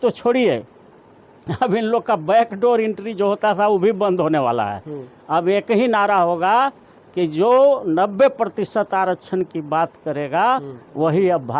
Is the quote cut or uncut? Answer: uncut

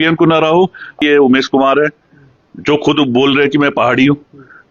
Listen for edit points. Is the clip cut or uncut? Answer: cut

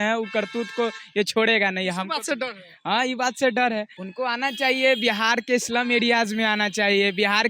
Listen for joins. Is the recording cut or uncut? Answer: cut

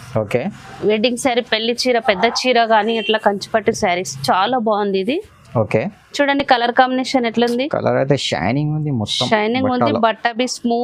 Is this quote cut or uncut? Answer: uncut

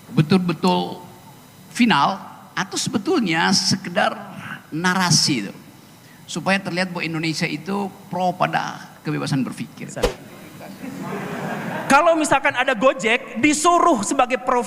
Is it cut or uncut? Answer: cut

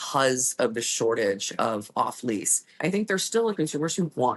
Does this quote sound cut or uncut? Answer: cut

